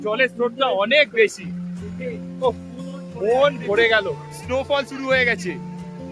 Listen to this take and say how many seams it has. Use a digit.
1